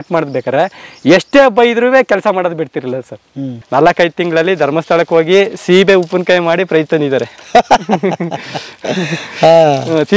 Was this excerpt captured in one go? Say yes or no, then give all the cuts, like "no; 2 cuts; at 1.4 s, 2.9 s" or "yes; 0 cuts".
no; 1 cut; at 3.5 s